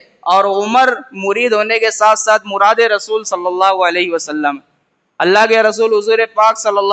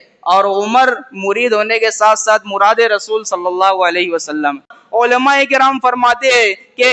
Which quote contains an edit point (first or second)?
second